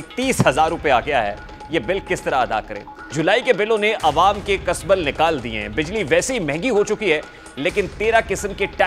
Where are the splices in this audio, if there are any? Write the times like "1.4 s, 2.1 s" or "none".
3.1 s